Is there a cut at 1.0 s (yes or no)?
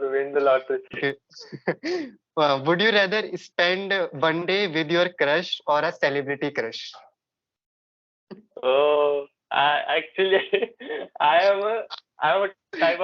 yes